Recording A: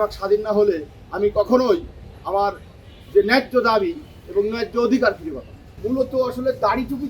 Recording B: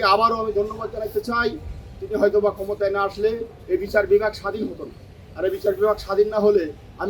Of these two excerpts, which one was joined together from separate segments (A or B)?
A